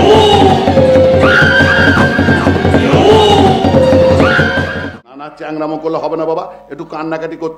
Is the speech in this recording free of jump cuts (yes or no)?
no